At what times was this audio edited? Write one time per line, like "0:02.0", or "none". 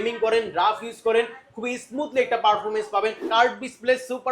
0:03.4